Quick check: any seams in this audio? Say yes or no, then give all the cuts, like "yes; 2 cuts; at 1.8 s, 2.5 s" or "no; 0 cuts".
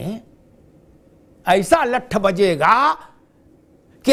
no; 0 cuts